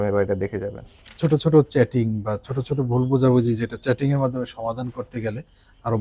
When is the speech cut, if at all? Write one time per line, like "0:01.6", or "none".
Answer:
0:01.1